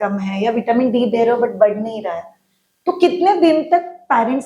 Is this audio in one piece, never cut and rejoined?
yes; 0 cuts

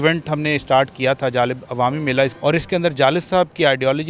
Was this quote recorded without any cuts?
no; 1 cut; at 2.3 s

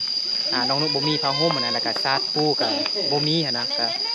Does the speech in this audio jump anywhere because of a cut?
no; 0 cuts

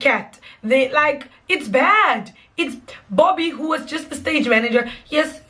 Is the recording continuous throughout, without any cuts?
yes; 0 cuts

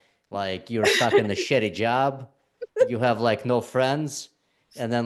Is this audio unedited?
yes; 0 cuts

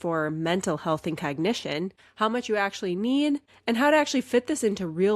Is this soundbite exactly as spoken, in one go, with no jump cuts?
no; 2 cuts; at 2.0 s, 3.5 s

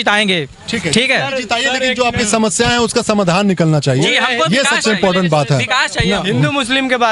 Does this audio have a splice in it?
no; 0 cuts

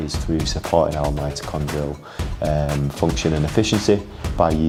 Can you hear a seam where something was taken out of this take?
no; 0 cuts

